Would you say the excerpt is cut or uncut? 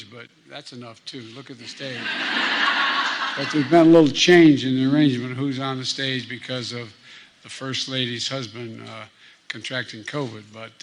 uncut